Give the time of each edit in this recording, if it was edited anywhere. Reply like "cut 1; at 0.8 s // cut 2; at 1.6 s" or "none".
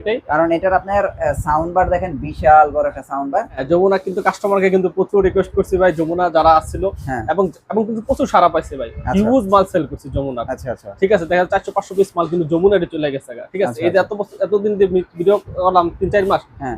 cut 1; at 3.6 s